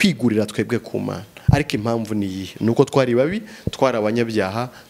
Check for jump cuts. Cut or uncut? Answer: uncut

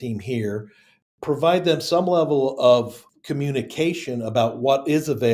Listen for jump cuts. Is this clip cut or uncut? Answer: cut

